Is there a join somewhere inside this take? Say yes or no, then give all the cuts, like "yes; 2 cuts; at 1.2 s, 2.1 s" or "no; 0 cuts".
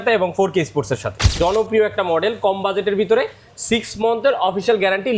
yes; 1 cut; at 1.2 s